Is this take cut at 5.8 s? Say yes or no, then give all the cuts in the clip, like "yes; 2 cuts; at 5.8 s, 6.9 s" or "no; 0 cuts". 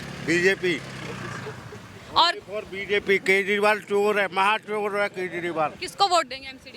yes; 1 cut; at 5.8 s